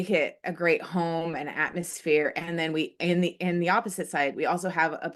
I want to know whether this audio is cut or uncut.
uncut